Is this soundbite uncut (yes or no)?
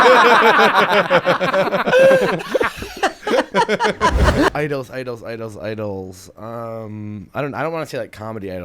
no